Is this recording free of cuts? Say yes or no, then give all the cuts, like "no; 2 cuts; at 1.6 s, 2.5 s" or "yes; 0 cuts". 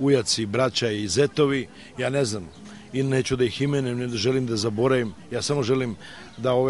yes; 0 cuts